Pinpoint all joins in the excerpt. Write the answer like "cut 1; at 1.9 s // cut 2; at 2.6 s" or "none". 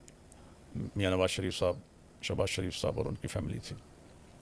none